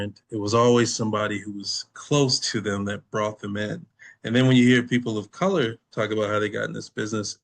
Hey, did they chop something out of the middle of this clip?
no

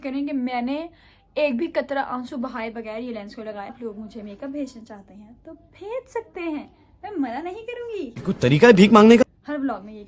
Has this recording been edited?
yes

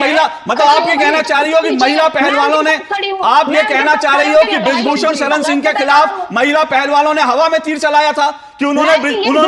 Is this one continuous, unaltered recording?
yes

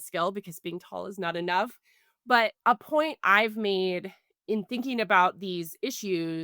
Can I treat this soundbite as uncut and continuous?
no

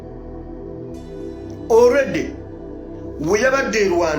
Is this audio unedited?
no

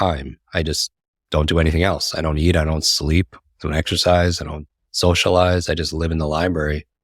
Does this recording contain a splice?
no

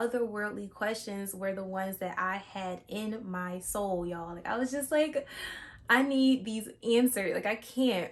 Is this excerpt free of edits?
yes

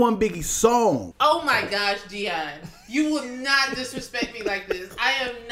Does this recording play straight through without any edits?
no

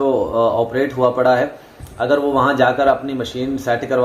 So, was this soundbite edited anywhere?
no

